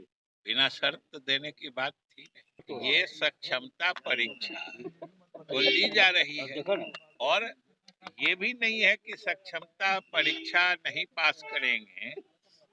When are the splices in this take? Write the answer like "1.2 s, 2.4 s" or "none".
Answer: 2.6 s